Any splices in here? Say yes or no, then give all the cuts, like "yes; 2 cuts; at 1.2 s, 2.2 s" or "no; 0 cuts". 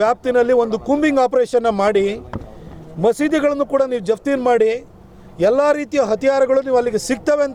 no; 0 cuts